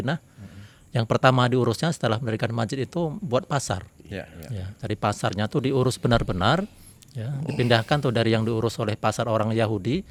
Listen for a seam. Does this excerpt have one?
no; 0 cuts

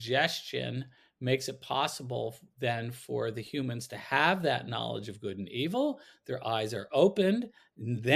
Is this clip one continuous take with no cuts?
yes; 0 cuts

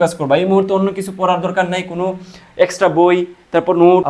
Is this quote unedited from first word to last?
yes; 0 cuts

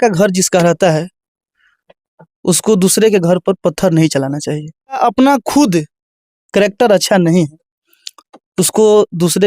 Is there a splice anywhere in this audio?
yes; 1 cut; at 5.0 s

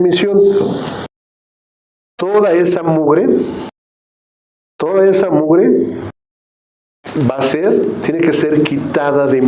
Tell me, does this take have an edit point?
no; 0 cuts

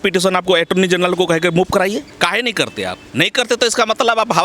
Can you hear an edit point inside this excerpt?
yes; 2 cuts; at 2.1 s, 3.0 s

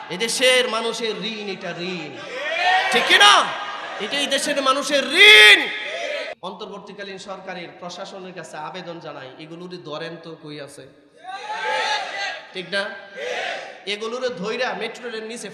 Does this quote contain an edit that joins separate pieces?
yes; 1 cut; at 6.3 s

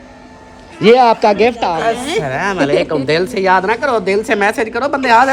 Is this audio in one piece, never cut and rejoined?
no; 1 cut; at 1.7 s

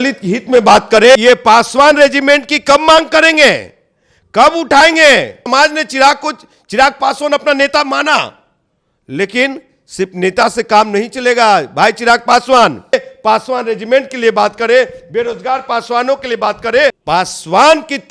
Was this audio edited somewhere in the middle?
yes; 4 cuts; at 1.1 s, 5.4 s, 12.9 s, 17.0 s

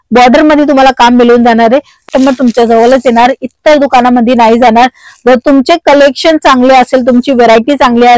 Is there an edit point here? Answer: yes; 1 cut; at 2.1 s

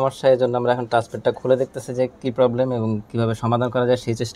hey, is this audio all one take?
yes; 0 cuts

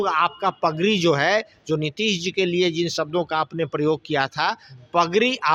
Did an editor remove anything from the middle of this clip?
no; 0 cuts

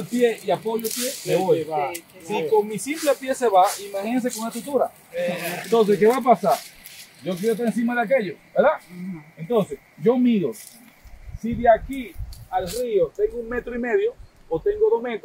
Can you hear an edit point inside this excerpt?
no; 0 cuts

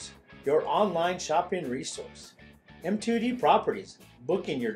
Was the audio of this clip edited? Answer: no; 0 cuts

